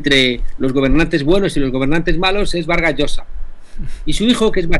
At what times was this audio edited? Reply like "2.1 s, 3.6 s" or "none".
none